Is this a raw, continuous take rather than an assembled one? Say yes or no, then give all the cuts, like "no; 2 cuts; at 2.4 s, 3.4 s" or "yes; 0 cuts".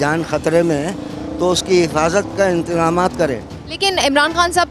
yes; 0 cuts